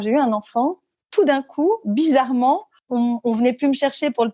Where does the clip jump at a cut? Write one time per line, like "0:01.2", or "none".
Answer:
0:02.8